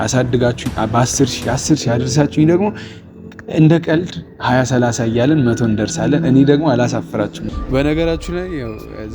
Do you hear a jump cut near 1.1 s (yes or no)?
no